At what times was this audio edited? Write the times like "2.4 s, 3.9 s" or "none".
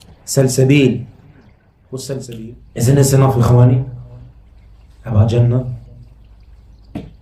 2.4 s